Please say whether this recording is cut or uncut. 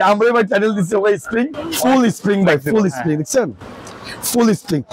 cut